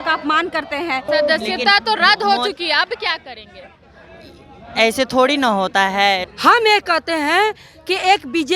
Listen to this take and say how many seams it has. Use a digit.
2